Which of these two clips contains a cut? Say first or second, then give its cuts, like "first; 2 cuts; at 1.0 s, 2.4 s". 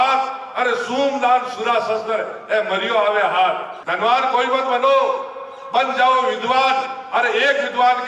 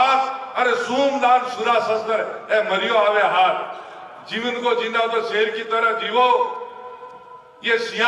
first; 1 cut; at 3.8 s